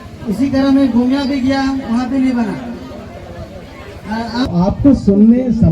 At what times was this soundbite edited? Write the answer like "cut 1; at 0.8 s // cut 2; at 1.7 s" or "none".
cut 1; at 4.5 s